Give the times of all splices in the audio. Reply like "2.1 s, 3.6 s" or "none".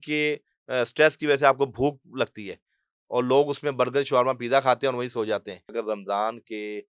5.7 s